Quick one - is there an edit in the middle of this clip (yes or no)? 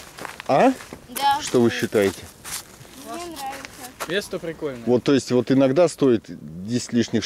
no